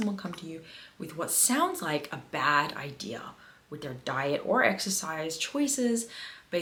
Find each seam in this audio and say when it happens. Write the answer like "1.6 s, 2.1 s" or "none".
none